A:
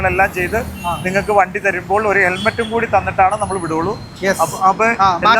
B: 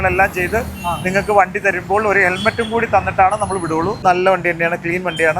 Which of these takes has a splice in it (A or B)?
B